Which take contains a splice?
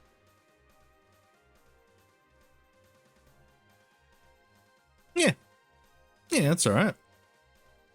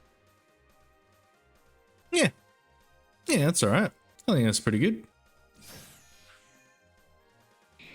second; 3 cuts; at 2.0 s, 4.1 s, 5.2 s

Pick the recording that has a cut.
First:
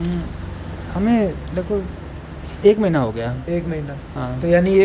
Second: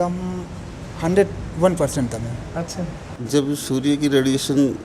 second; 1 cut; at 3.1 s

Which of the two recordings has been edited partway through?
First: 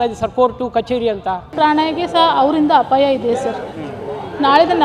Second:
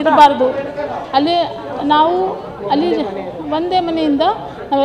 first; 1 cut; at 1.5 s

